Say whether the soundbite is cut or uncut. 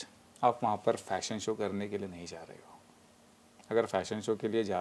uncut